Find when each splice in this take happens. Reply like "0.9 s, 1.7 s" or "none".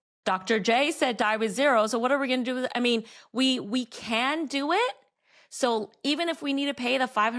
none